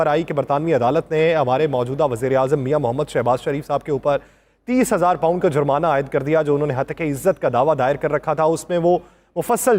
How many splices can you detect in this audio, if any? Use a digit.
0